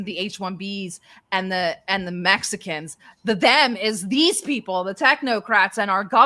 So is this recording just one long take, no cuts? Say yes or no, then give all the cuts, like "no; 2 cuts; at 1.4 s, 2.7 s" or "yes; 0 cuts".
yes; 0 cuts